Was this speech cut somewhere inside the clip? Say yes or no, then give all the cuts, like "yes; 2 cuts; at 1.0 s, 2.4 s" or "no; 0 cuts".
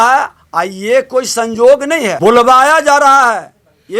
yes; 1 cut; at 2.1 s